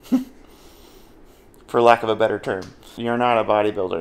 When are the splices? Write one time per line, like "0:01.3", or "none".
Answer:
0:02.9